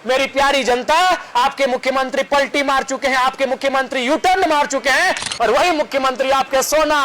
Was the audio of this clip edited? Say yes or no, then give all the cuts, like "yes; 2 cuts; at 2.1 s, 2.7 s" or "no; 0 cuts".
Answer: yes; 1 cut; at 5.2 s